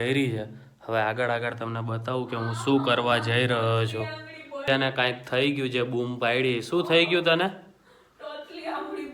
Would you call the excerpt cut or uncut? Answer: uncut